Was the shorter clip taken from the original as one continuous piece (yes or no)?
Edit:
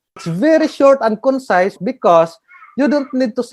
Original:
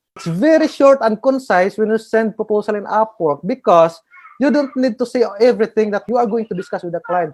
no